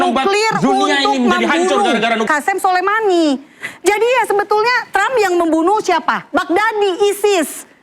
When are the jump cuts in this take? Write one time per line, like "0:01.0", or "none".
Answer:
0:02.2